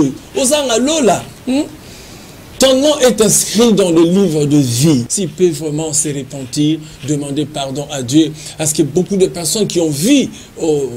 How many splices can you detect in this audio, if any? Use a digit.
1